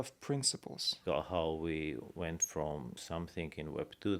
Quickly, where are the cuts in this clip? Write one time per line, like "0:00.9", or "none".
0:01.0
0:03.0